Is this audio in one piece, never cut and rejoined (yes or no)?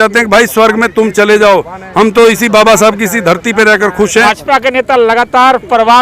no